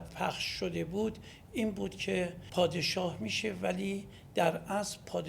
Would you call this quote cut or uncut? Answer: cut